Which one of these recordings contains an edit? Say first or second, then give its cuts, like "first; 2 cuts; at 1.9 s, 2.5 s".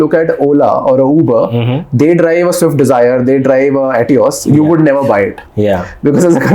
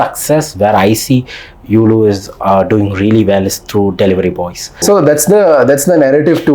second; 1 cut; at 4.8 s